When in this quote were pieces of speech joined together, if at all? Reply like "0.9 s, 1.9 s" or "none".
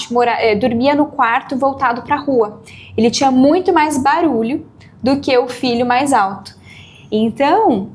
none